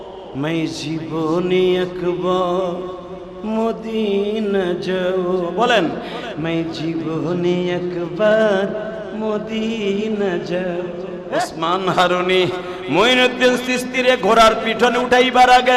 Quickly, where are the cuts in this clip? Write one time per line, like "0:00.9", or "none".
0:11.2